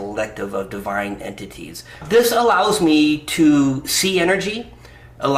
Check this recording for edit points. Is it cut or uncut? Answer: cut